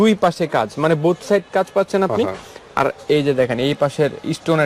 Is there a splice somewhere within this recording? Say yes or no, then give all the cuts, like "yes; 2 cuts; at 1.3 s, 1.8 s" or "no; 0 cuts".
no; 0 cuts